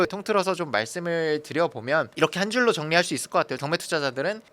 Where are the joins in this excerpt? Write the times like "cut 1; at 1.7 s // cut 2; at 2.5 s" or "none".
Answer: cut 1; at 3.6 s